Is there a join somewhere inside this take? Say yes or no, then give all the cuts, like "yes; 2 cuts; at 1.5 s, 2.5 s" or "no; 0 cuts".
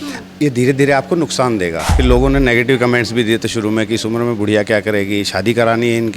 yes; 1 cut; at 1.9 s